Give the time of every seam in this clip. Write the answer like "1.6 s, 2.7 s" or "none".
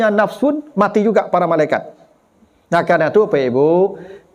none